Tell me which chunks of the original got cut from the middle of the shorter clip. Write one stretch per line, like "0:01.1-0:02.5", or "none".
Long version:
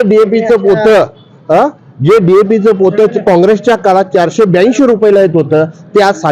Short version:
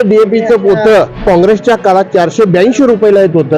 0:01.2-0:03.2